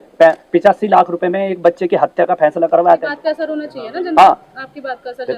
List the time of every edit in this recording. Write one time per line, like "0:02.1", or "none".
0:03.1